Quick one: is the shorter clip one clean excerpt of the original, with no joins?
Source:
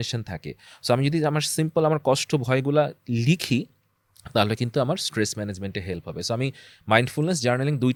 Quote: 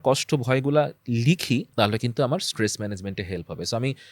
no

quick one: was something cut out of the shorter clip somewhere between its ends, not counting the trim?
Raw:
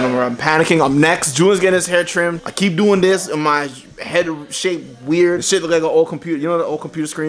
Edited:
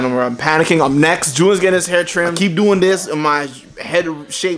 yes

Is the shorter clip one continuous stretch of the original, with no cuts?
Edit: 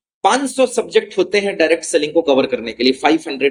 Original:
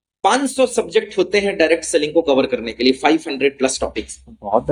yes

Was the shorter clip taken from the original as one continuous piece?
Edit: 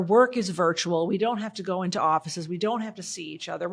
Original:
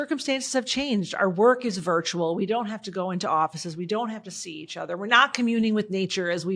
yes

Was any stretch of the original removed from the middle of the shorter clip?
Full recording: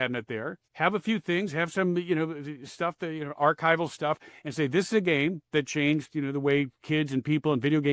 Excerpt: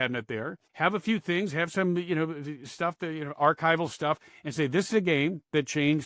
no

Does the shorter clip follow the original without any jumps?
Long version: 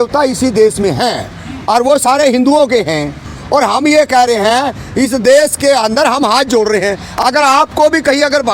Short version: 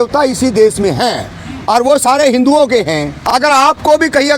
no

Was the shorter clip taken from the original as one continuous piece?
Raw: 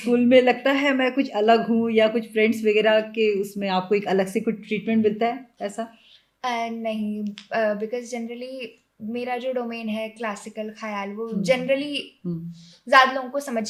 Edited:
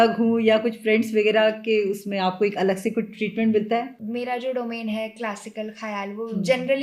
no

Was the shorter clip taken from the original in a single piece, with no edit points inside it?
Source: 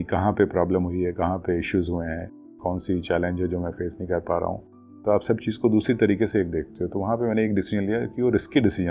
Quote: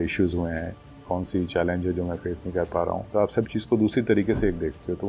no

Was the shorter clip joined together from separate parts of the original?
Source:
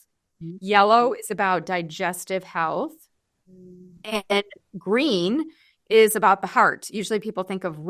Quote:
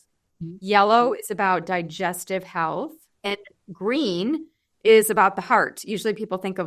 yes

